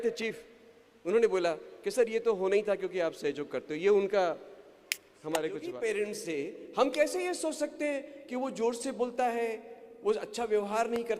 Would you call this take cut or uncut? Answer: cut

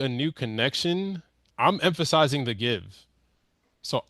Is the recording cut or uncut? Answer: uncut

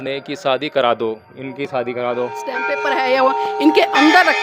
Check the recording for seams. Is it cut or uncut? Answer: cut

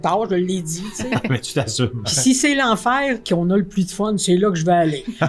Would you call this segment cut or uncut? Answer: cut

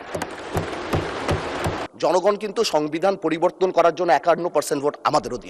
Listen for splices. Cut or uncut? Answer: cut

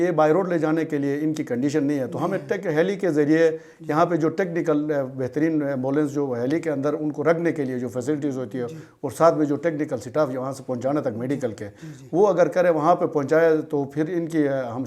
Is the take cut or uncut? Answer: uncut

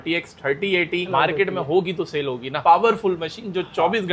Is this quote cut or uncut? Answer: cut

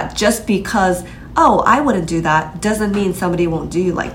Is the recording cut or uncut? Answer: uncut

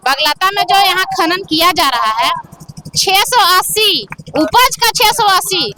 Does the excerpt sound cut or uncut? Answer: uncut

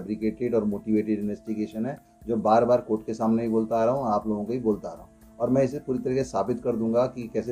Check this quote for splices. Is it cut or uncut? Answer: uncut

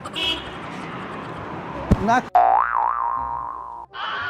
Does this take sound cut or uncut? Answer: cut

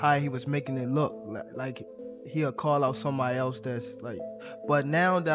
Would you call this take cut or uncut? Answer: uncut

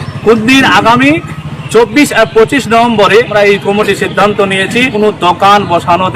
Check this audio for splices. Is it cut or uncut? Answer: cut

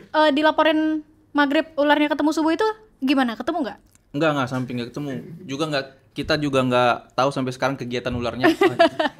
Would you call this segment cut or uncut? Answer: uncut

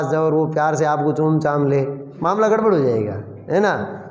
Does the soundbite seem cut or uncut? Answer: cut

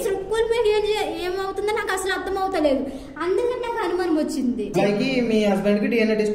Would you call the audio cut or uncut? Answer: cut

